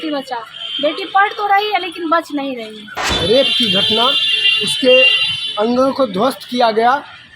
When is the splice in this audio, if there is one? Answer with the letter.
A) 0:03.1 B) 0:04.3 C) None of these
A